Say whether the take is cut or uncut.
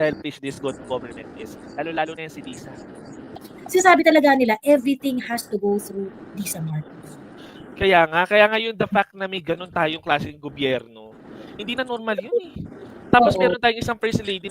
cut